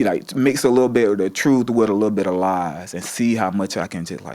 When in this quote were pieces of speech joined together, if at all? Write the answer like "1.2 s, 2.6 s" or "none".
none